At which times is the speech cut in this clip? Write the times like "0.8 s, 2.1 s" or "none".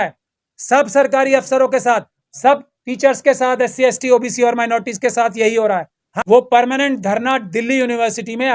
6.0 s